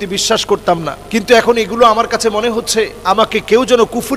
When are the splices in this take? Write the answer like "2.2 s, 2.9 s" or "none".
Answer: 0.9 s, 3.0 s